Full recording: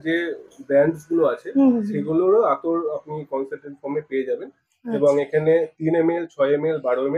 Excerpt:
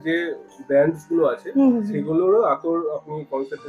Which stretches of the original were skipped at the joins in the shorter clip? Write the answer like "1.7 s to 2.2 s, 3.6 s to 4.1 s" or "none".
none